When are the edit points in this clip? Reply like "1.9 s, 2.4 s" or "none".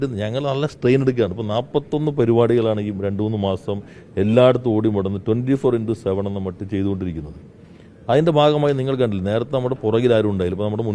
none

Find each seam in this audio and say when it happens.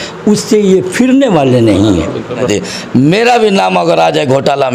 2.5 s

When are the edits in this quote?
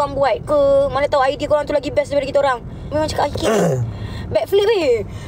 2.9 s

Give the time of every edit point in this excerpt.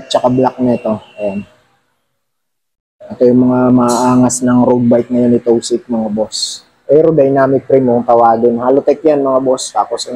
none

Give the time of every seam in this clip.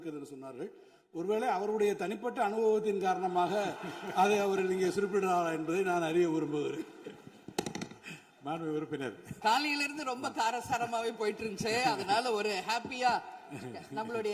9.4 s

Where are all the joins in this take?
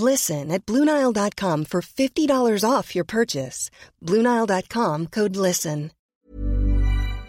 6.1 s

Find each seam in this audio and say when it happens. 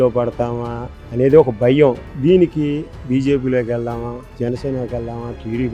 none

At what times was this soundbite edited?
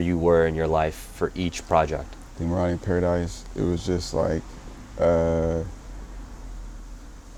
none

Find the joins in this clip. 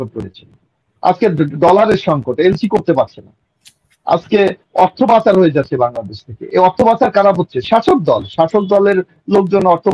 none

